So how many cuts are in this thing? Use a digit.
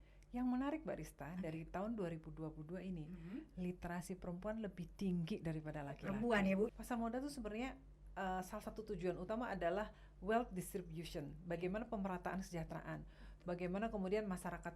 1